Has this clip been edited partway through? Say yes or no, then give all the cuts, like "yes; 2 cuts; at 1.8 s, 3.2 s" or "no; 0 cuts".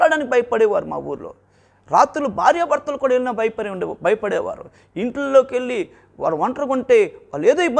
no; 0 cuts